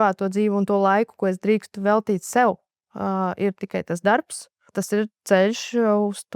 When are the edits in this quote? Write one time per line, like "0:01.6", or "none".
0:04.7